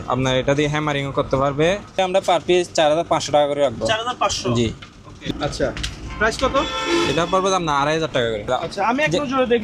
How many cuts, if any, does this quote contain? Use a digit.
3